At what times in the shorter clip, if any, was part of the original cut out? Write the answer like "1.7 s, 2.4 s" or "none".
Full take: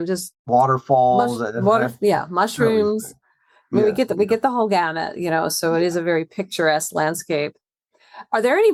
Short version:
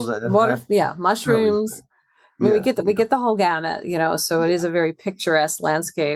none